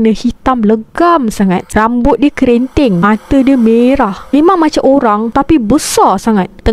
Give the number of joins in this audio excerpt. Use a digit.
1